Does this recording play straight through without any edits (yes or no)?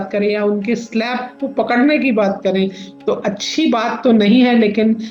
yes